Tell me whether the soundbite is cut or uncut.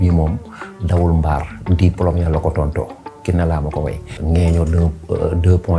cut